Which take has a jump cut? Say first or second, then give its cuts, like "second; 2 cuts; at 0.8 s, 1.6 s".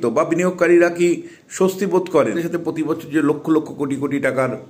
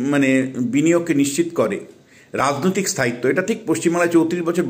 first; 1 cut; at 2.4 s